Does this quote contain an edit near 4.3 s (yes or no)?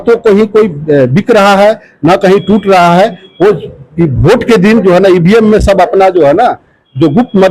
no